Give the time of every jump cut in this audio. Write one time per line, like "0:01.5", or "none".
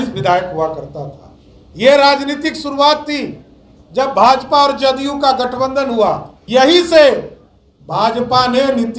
0:06.3

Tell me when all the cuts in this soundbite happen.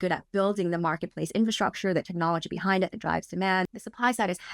0:03.6

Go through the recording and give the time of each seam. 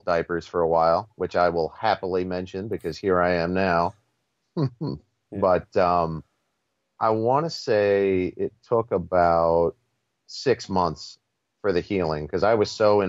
none

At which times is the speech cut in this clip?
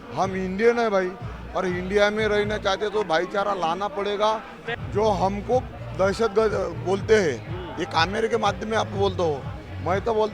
0:04.6

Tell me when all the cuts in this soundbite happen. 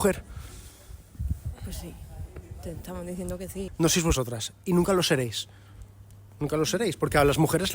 0:03.6

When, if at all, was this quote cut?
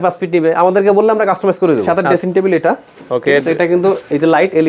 0:01.9

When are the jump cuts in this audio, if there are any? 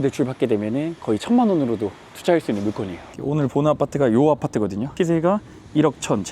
0:03.0

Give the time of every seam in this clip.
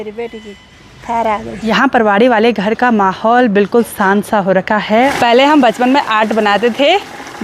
0:01.6
0:05.1

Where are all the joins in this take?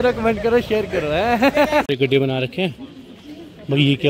0:01.9

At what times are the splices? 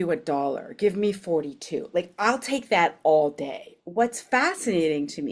0:03.7

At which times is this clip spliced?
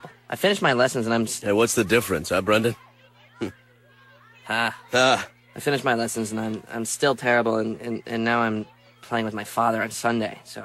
0:01.4

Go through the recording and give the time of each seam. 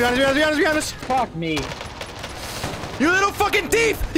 0:00.9

